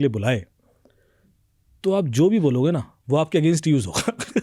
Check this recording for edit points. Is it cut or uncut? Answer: uncut